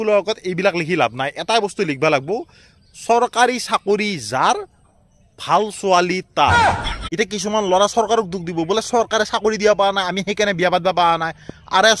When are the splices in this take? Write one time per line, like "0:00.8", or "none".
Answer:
0:06.9